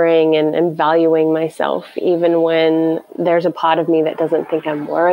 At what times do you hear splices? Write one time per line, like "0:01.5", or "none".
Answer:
none